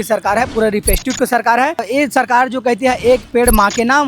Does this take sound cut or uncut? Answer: cut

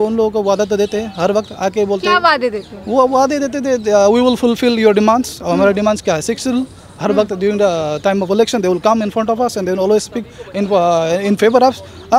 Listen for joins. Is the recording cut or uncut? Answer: uncut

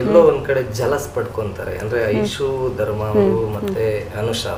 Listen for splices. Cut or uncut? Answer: uncut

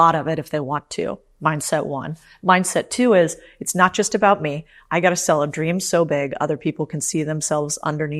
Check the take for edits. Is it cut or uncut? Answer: uncut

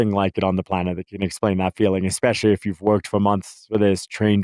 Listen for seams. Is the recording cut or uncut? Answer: uncut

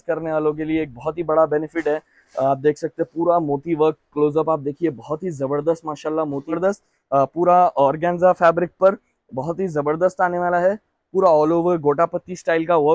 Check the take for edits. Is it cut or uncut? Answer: cut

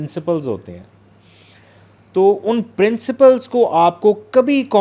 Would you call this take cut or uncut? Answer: uncut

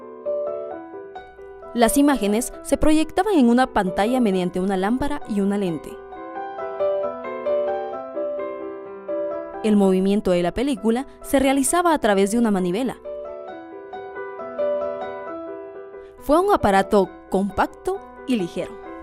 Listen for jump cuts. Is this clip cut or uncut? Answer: cut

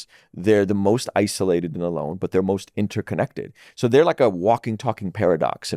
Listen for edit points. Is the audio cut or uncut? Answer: uncut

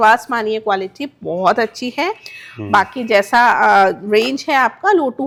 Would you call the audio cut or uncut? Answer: uncut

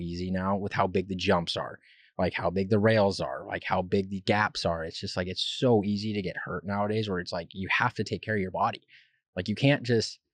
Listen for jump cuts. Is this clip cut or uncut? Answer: uncut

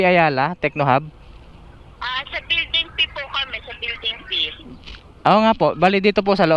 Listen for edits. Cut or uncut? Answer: uncut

